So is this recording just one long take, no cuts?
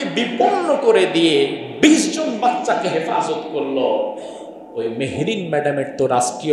yes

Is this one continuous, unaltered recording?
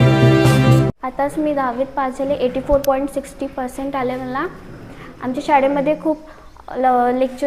no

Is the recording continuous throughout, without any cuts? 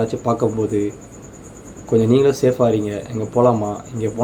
yes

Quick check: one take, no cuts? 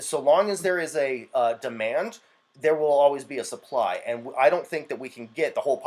yes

